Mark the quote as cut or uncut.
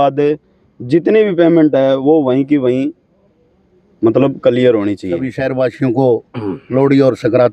cut